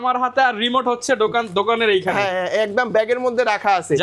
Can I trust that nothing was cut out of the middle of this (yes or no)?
yes